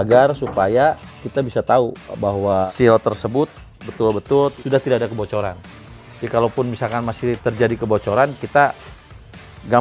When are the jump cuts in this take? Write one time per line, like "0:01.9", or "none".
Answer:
0:02.7
0:04.6